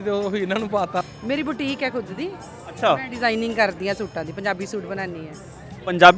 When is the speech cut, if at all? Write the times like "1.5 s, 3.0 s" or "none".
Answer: 1.1 s